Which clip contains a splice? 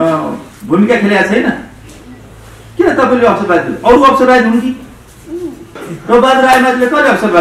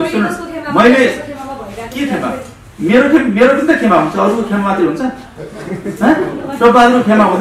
first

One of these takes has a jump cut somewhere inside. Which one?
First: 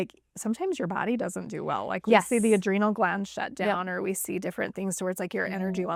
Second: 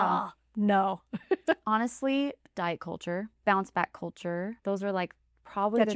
second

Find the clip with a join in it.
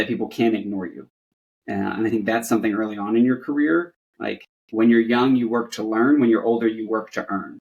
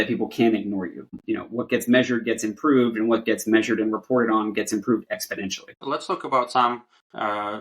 second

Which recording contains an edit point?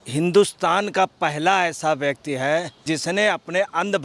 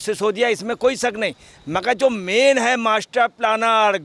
first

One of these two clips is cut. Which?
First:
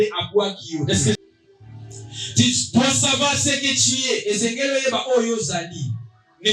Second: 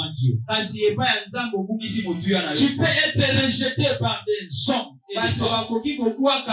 first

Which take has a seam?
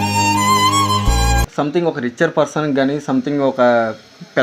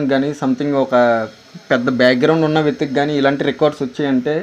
first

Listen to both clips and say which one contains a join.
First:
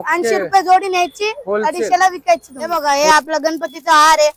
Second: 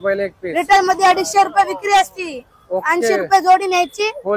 first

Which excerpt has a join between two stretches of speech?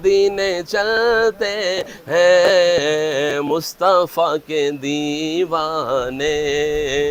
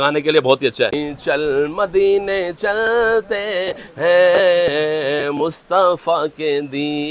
second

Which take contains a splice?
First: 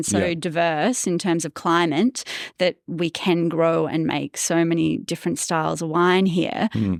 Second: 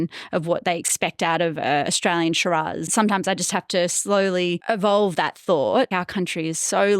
second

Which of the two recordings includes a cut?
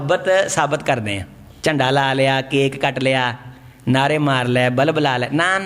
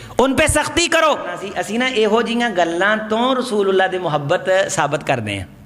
second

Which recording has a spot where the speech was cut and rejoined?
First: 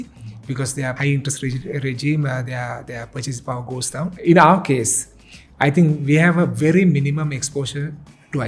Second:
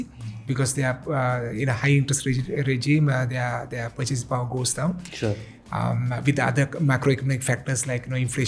first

